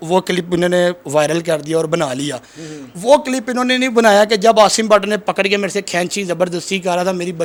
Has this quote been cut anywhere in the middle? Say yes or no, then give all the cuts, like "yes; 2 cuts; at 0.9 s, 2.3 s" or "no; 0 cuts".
no; 0 cuts